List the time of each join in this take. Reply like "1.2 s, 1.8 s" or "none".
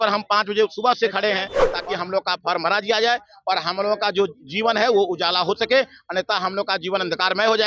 1.6 s